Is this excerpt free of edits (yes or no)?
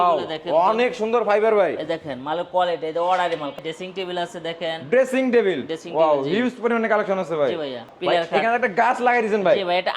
no